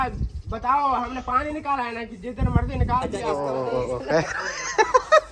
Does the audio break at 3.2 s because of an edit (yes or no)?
yes